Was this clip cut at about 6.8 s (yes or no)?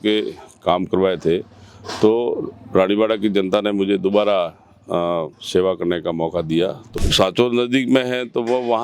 yes